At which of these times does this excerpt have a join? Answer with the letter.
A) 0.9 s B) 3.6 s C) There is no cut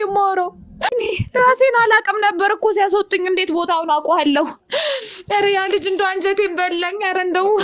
A